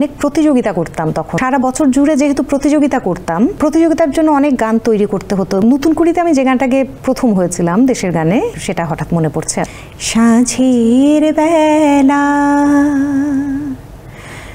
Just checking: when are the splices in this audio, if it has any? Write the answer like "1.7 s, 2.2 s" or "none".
1.3 s, 3.6 s, 5.6 s, 7.0 s, 8.6 s, 9.7 s